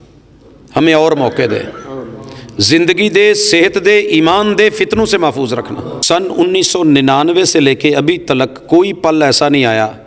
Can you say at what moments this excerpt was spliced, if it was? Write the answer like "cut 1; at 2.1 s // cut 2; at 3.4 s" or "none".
cut 1; at 5.9 s